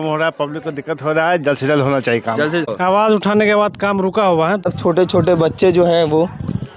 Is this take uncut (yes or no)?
no